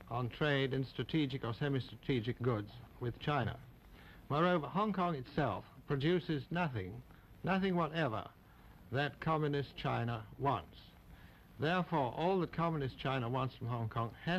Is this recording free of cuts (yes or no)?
no